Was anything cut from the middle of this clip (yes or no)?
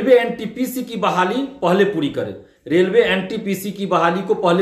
no